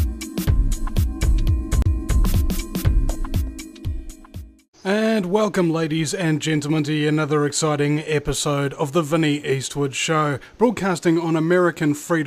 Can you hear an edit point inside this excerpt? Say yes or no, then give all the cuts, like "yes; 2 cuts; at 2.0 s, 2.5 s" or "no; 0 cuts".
no; 0 cuts